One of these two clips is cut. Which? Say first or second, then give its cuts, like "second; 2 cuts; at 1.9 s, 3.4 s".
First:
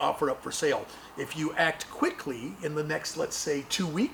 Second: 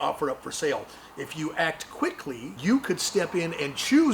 second; 1 cut; at 2.5 s